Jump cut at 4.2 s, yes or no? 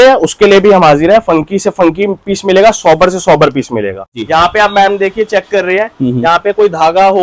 yes